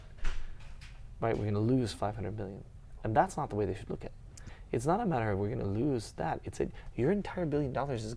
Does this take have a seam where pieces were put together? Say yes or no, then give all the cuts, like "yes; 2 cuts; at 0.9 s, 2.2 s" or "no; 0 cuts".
yes; 1 cut; at 4.4 s